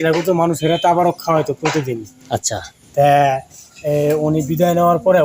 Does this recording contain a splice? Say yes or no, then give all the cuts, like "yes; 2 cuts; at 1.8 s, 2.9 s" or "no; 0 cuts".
no; 0 cuts